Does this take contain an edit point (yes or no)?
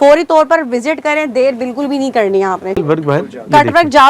yes